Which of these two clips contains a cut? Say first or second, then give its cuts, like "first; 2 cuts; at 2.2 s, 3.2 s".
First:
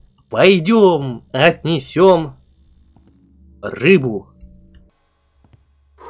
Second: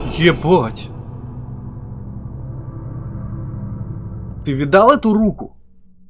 first; 1 cut; at 4.8 s